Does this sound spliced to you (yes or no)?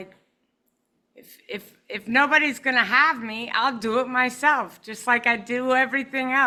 no